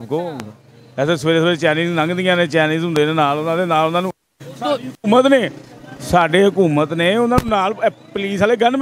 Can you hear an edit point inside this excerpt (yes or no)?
no